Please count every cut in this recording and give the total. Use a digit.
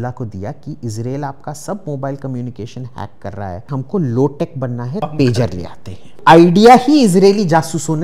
3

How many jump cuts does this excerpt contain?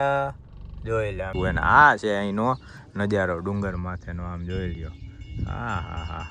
1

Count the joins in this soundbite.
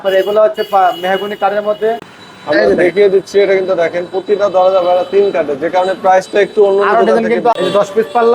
2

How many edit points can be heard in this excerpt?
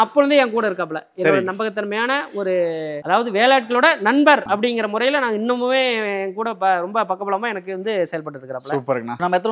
0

